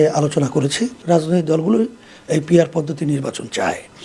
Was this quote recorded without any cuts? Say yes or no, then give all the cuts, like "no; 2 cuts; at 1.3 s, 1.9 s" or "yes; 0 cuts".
no; 1 cut; at 1.0 s